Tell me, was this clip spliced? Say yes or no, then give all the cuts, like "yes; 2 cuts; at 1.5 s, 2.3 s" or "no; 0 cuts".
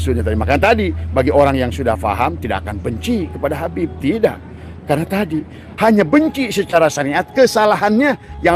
no; 0 cuts